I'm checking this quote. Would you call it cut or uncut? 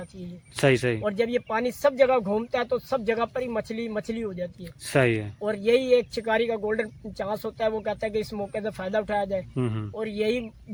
uncut